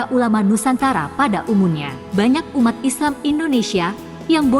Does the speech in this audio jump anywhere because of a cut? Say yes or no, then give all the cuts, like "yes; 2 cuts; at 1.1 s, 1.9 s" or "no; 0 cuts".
yes; 1 cut; at 1.9 s